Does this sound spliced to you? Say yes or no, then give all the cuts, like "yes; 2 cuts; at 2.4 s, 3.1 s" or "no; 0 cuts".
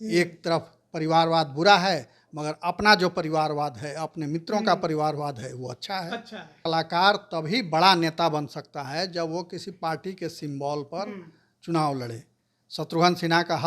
yes; 1 cut; at 6.6 s